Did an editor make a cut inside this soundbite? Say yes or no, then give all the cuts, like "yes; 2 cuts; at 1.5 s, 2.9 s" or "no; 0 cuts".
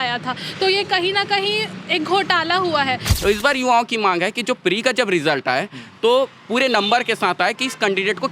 yes; 1 cut; at 3.1 s